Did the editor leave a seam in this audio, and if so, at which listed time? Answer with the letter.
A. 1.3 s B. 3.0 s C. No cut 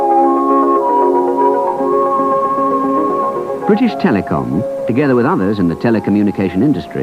B